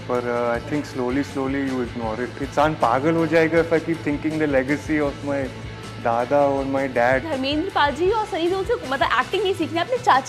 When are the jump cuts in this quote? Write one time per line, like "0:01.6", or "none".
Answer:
0:02.4
0:07.2